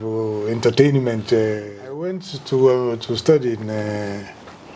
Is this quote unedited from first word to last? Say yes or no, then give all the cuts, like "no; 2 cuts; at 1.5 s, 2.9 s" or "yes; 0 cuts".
no; 1 cut; at 2.2 s